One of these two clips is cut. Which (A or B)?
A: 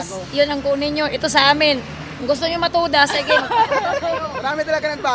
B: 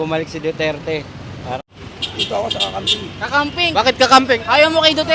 B